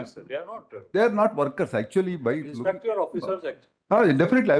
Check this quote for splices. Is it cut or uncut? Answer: cut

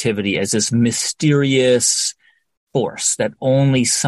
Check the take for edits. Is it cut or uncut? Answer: uncut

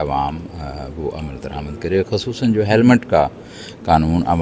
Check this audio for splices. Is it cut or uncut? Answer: uncut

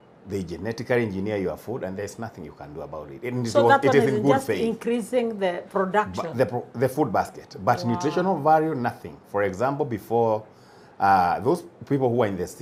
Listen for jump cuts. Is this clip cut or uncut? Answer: uncut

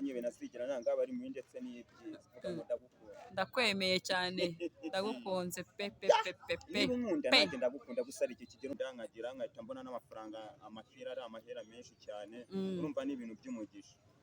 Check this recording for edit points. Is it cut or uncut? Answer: cut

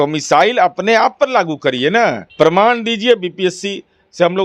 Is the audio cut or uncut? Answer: cut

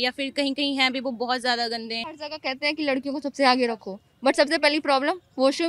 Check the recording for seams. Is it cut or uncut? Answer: cut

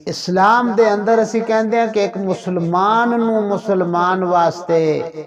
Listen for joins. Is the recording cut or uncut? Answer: uncut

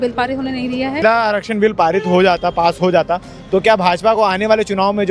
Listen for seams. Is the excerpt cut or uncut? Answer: cut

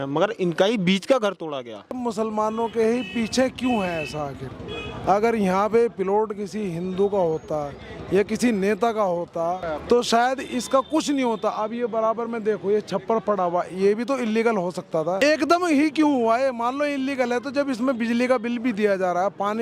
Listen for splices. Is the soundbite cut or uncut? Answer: cut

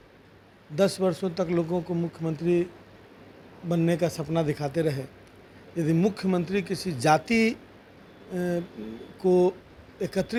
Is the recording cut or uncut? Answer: uncut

